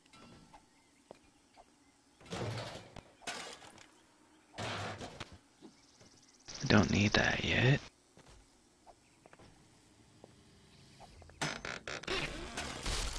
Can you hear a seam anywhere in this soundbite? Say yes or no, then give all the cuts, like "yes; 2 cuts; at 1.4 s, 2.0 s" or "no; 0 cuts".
yes; 1 cut; at 6.5 s